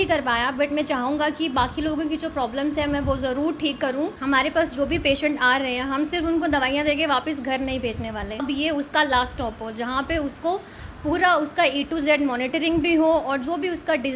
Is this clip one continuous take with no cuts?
no; 2 cuts; at 4.2 s, 8.4 s

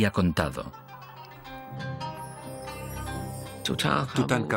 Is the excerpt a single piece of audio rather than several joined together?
no; 1 cut; at 1.9 s

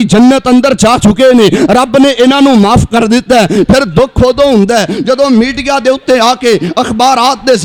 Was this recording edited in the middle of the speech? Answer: no; 0 cuts

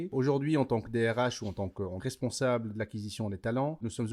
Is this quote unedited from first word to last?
no; 1 cut; at 2.0 s

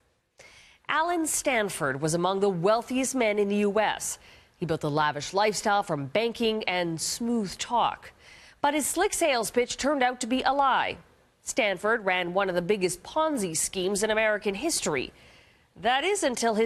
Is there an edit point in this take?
no; 0 cuts

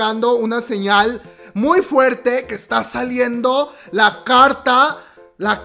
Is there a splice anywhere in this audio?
no; 0 cuts

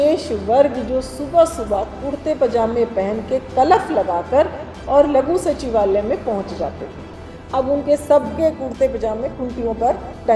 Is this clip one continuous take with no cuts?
no; 1 cut; at 7.3 s

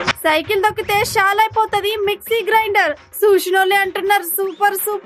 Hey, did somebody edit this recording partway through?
no; 0 cuts

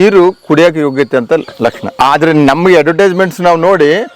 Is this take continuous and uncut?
no; 1 cut; at 1.8 s

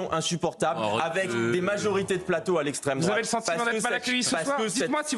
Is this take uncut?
yes; 0 cuts

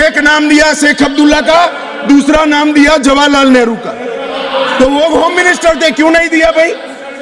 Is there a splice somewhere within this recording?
no; 0 cuts

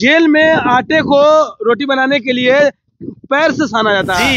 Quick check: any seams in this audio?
no; 0 cuts

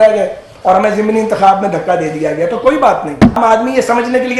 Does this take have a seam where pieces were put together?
yes; 1 cut; at 3.4 s

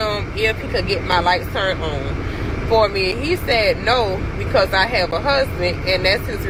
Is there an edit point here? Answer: no; 0 cuts

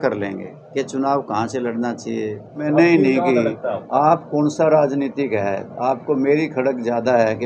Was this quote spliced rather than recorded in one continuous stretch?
yes; 1 cut; at 2.6 s

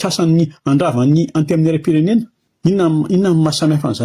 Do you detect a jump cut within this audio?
yes; 1 cut; at 2.4 s

